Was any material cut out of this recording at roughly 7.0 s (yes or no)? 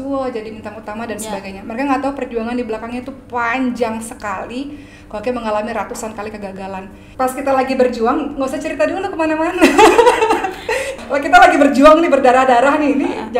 yes